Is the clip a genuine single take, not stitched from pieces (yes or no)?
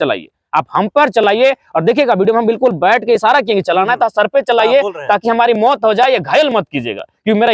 yes